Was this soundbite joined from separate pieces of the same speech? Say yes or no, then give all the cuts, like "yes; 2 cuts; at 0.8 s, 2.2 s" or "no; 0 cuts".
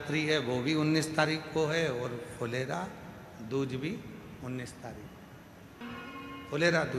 yes; 1 cut; at 5.8 s